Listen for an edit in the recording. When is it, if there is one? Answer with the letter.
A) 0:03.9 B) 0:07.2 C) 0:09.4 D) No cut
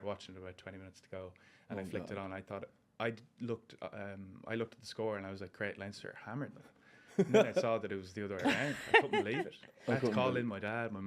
D